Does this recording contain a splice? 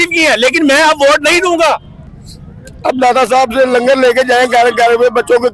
yes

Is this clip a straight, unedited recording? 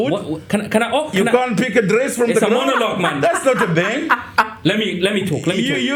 yes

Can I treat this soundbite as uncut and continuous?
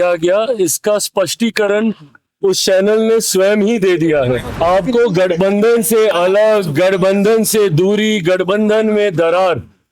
no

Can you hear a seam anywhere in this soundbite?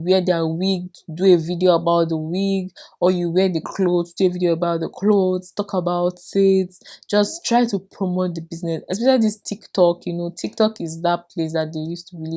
no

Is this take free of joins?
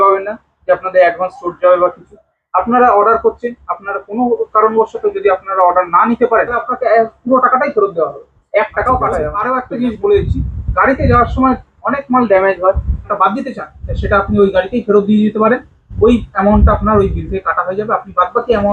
no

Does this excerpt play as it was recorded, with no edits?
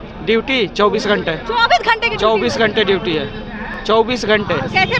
yes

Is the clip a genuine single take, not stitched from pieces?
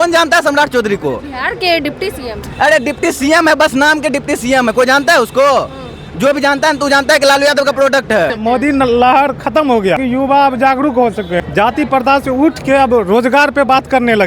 no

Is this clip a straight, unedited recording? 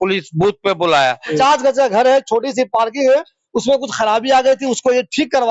no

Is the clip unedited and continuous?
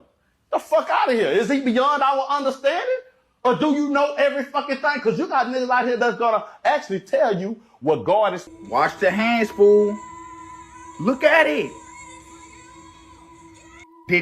no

